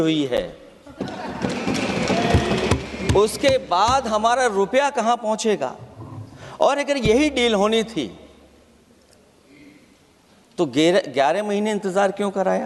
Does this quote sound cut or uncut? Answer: uncut